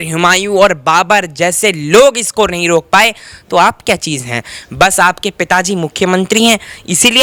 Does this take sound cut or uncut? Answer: uncut